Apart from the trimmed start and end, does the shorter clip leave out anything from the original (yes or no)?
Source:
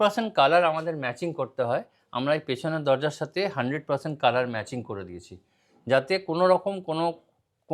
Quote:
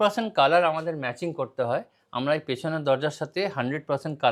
no